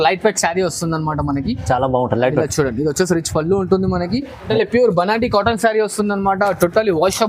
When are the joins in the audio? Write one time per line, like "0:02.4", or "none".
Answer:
0:04.5